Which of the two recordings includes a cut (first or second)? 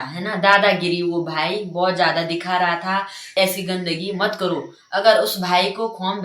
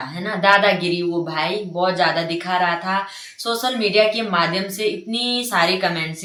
first